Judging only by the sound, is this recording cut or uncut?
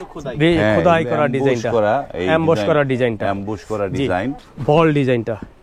cut